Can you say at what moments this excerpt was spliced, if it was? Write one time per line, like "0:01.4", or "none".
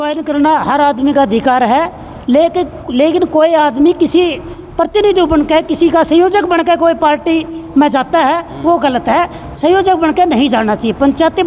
none